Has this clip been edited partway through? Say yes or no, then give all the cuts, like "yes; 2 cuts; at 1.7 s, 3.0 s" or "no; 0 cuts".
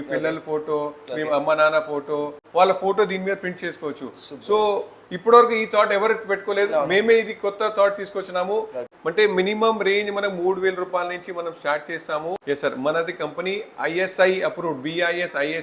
yes; 3 cuts; at 2.4 s, 8.9 s, 12.4 s